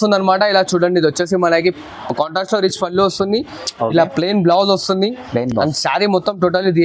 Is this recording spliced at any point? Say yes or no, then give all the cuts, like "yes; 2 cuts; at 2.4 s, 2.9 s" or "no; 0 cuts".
no; 0 cuts